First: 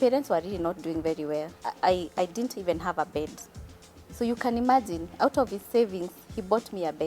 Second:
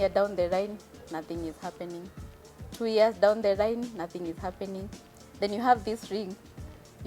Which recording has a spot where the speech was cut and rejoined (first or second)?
first